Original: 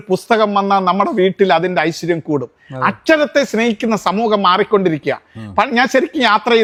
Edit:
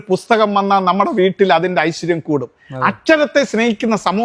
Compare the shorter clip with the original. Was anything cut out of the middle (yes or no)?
no